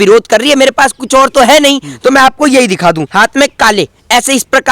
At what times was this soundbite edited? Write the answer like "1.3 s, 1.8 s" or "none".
3.0 s